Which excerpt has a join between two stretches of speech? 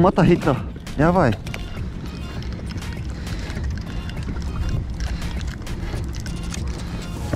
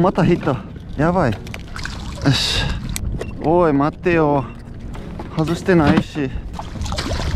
second; 3 cuts; at 1.7 s, 3.0 s, 6.5 s

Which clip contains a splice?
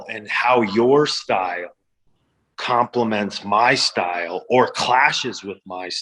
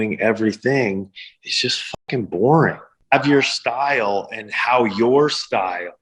second; 1 cut; at 2.9 s

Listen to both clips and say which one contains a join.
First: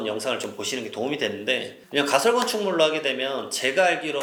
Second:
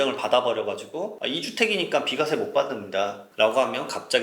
second; 1 cut; at 1.2 s

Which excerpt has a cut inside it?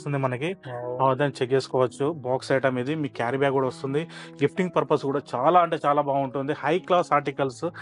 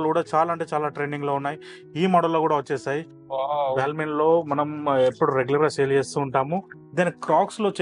second; 2 cuts; at 3.2 s, 6.8 s

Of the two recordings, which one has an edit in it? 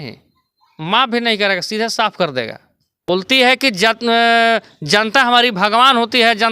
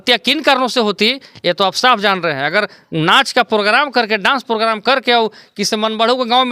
first; 1 cut; at 3.1 s

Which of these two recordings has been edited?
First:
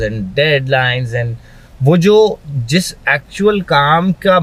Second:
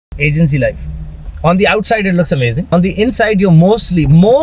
second; 2 cuts; at 1.3 s, 2.7 s

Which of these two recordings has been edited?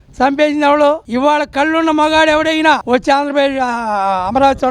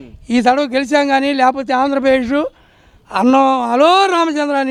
first; 1 cut; at 1.1 s

